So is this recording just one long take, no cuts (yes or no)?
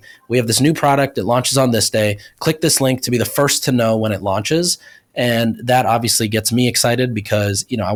yes